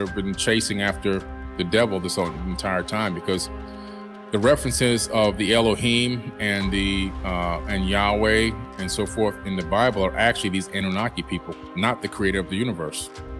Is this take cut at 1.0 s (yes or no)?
no